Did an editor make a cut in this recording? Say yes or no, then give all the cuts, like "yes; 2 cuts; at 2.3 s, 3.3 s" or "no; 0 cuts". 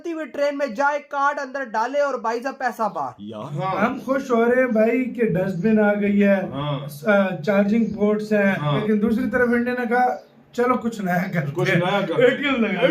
yes; 2 cuts; at 3.5 s, 8.7 s